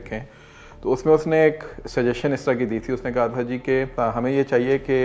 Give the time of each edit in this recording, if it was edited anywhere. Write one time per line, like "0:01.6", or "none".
0:03.9